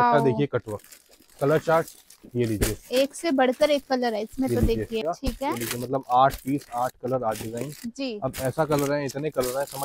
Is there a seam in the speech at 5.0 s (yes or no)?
yes